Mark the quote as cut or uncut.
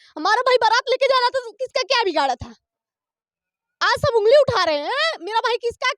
uncut